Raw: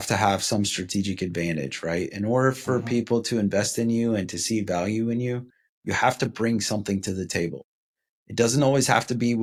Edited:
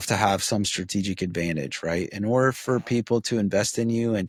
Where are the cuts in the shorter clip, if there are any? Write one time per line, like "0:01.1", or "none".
none